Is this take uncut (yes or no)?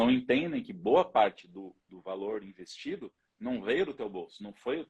yes